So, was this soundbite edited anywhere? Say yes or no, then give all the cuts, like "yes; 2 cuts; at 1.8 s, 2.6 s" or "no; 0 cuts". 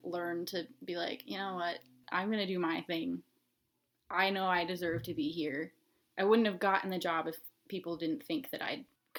no; 0 cuts